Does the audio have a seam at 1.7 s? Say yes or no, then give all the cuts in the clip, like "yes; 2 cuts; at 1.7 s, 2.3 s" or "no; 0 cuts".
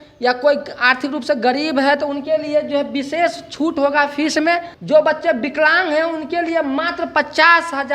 no; 1 cut; at 4.7 s